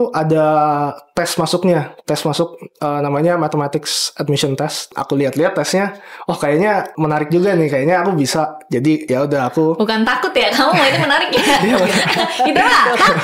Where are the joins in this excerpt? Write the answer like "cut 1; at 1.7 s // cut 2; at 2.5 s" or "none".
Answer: cut 1; at 5.0 s // cut 2; at 6.9 s // cut 3; at 9.0 s